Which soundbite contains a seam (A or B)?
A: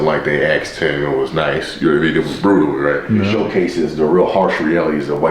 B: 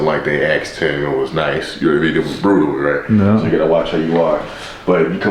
A